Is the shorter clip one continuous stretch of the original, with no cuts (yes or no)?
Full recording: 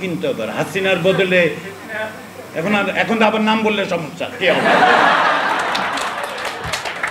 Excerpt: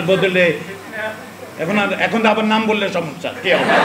yes